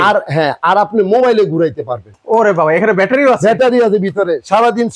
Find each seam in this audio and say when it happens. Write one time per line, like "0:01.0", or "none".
0:02.1